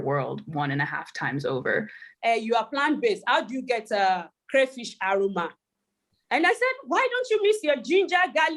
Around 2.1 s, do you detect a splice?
yes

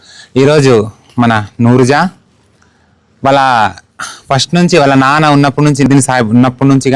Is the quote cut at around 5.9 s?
yes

